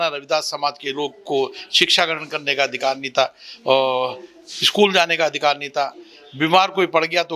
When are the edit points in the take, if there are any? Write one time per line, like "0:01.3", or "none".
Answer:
none

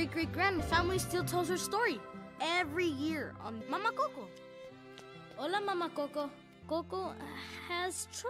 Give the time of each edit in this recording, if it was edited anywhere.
0:06.5

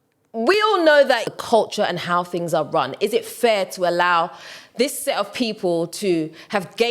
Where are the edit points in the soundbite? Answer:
0:01.3

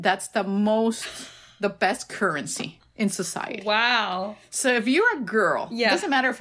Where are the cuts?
none

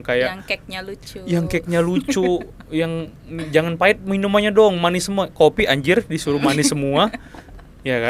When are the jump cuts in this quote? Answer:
none

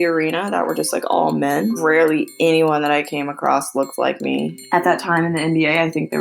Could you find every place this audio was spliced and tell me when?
0:01.8
0:04.6

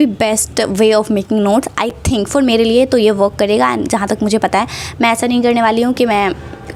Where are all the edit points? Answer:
none

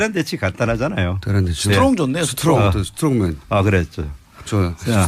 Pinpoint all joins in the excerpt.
none

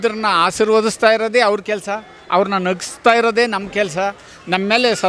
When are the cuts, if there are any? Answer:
none

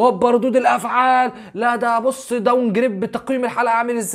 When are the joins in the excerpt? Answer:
none

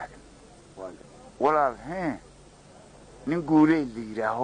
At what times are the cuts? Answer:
0:01.1

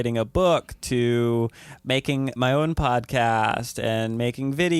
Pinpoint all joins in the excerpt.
0:02.3

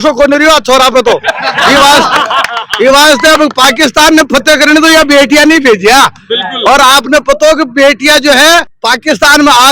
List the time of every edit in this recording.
0:08.7

